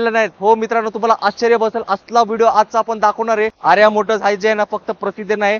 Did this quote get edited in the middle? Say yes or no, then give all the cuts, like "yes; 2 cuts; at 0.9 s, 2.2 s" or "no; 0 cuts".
yes; 1 cut; at 3.5 s